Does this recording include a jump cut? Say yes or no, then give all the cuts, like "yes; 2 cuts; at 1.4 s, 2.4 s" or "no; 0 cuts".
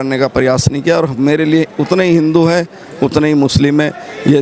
no; 0 cuts